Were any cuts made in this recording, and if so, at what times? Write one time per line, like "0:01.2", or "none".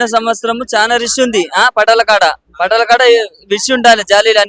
none